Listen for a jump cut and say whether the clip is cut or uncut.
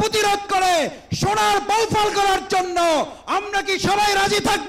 uncut